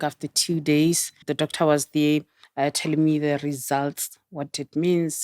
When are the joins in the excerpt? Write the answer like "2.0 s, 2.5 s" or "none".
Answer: 1.2 s, 2.4 s